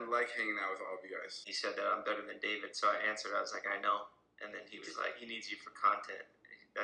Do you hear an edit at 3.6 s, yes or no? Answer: no